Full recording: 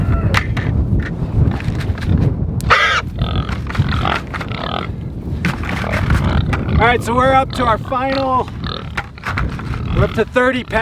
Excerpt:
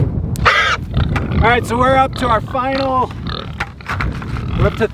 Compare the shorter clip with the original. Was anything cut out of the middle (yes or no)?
yes